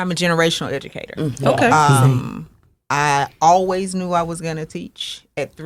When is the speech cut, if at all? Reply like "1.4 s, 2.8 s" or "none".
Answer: none